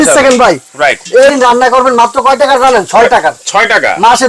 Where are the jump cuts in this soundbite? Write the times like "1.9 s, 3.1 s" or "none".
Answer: 1.3 s

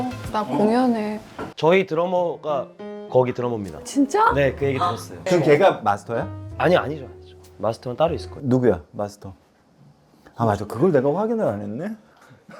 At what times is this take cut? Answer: 1.4 s, 5.2 s

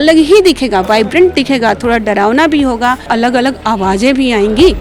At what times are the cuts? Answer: 3.0 s

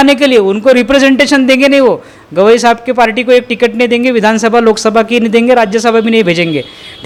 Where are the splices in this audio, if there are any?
none

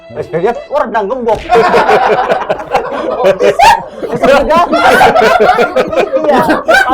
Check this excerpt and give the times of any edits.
none

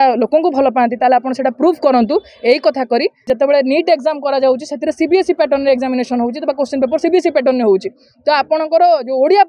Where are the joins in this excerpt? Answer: 3.2 s

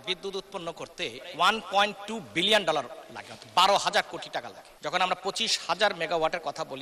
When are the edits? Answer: 1.2 s, 4.6 s

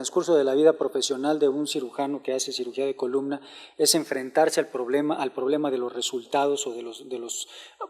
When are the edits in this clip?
5.6 s

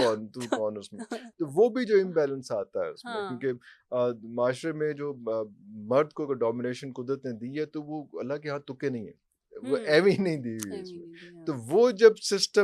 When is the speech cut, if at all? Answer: none

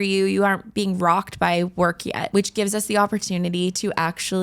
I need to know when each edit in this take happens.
2.3 s

